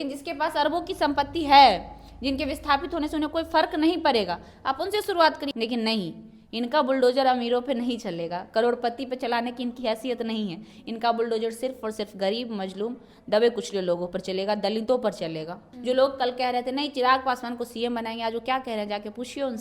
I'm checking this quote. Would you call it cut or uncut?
cut